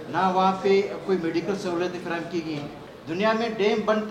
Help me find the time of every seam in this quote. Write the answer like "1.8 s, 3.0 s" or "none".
2.8 s